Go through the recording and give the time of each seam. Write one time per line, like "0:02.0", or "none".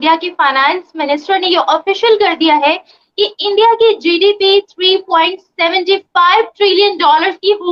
none